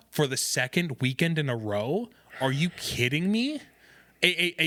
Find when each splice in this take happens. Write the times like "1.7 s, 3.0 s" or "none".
none